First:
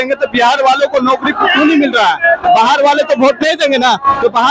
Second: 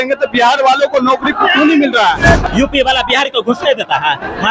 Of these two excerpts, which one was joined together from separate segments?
second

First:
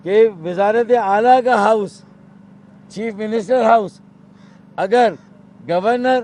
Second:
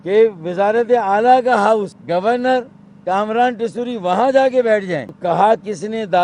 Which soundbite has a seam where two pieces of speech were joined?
second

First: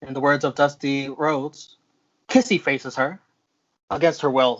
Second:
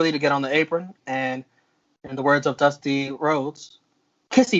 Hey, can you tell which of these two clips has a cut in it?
first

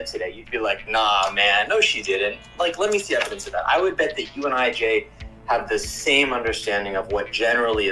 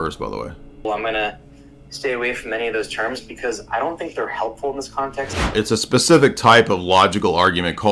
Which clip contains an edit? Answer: second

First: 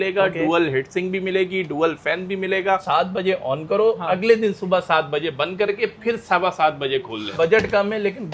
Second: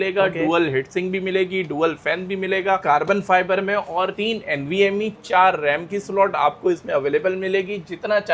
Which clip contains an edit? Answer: first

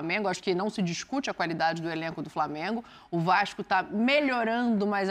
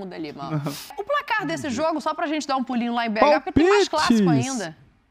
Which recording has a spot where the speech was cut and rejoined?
second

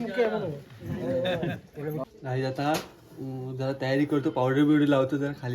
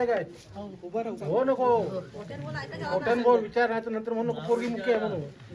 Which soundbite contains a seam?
first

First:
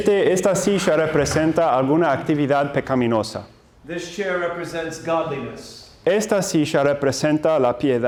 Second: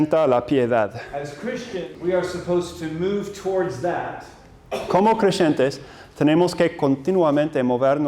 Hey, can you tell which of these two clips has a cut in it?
second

